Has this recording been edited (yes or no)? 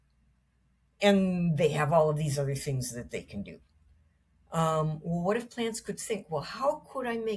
no